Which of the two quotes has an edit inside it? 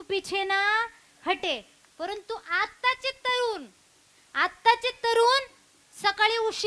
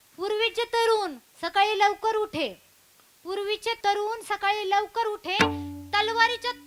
second; 1 cut; at 3.8 s

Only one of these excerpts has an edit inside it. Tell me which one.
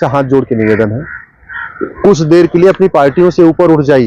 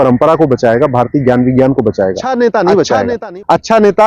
second; 1 cut; at 2.2 s

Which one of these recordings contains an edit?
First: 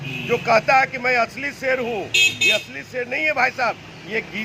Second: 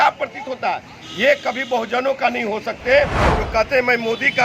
second; 1 cut; at 3.2 s

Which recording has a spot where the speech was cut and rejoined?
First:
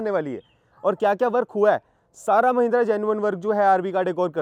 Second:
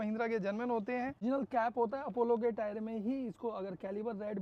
second; 1 cut; at 1.2 s

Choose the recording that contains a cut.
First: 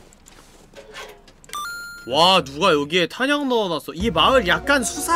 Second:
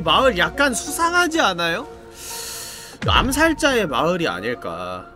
second; 1 cut; at 2.1 s

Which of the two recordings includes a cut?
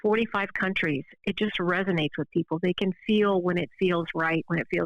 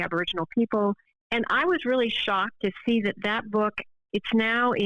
second; 3 cuts; at 1.1 s, 2.6 s, 3.9 s

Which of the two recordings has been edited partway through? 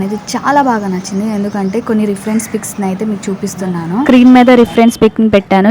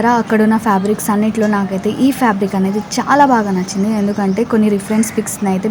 first; 1 cut; at 4.1 s

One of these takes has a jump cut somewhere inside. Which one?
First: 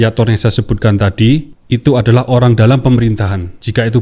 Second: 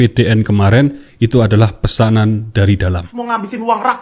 second; 1 cut; at 3.1 s

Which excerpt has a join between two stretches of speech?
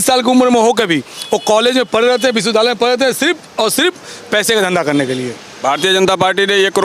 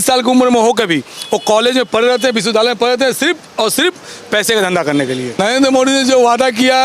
second; 1 cut; at 5.4 s

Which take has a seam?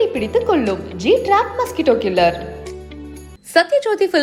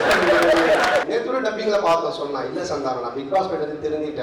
second; 1 cut; at 1.0 s

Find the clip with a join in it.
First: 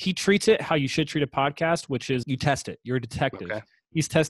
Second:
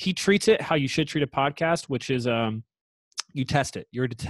first; 1 cut; at 2.2 s

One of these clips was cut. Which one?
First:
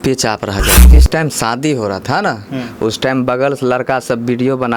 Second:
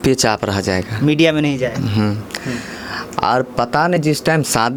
first; 1 cut; at 0.9 s

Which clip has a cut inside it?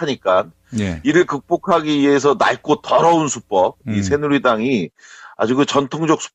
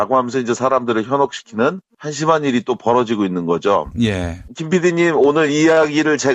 second; 1 cut; at 4.3 s

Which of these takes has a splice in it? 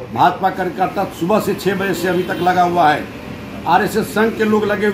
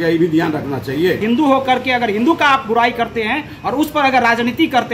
second; 1 cut; at 1.2 s

